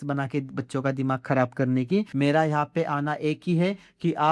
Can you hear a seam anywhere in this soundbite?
yes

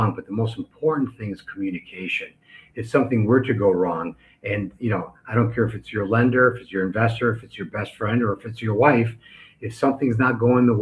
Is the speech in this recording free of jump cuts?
yes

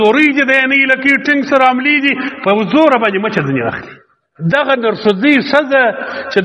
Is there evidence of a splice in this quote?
yes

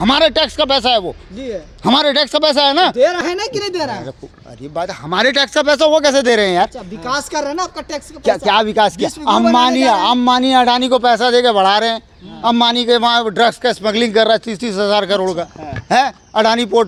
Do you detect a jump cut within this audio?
no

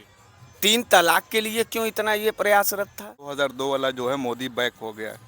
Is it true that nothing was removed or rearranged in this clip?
no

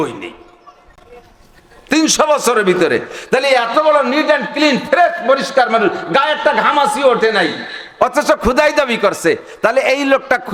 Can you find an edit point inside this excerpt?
no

